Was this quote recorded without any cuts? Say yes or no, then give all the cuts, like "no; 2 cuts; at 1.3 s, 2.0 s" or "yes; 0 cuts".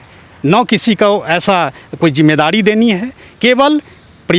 yes; 0 cuts